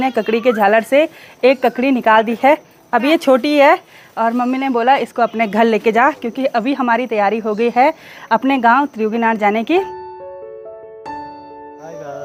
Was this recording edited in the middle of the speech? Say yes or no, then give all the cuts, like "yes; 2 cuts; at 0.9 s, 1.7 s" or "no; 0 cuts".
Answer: no; 0 cuts